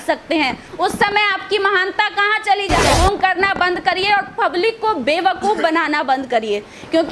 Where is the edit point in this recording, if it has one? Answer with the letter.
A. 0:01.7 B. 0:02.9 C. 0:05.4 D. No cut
B